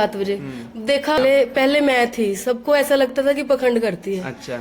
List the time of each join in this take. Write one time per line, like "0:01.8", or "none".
0:01.2